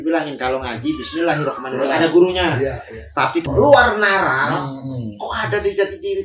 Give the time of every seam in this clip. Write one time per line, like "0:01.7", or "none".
0:03.4